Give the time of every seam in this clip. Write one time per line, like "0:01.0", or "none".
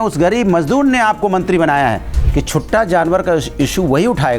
0:02.1

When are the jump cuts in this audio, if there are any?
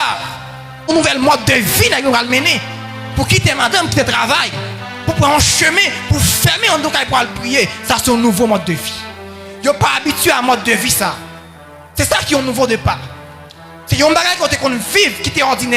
0:00.9

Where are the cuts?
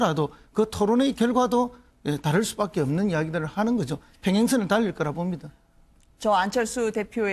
none

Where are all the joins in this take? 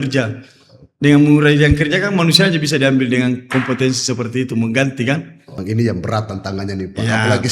0:05.6

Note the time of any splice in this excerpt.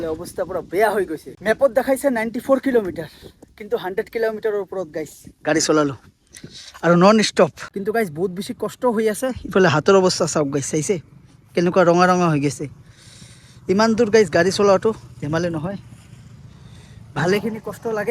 0:01.3
0:07.7

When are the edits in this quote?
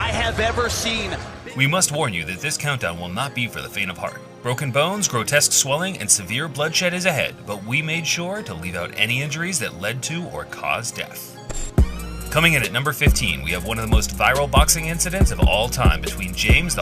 0:09.3

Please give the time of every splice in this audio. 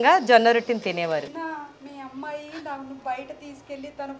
0:01.4

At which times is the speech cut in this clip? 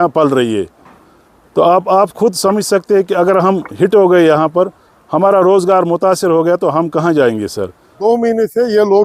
0:07.9

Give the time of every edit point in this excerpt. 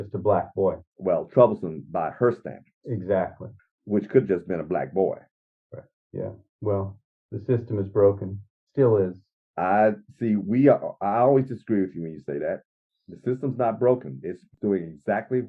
0:14.5

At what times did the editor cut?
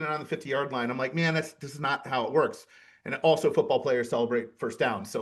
none

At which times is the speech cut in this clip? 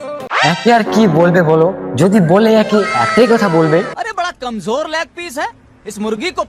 none

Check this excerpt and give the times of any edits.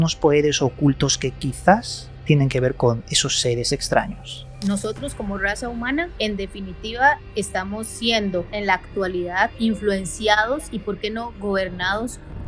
0:04.5
0:06.1
0:09.5

